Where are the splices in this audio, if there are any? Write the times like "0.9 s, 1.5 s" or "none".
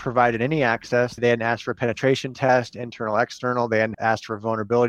1.2 s, 3.9 s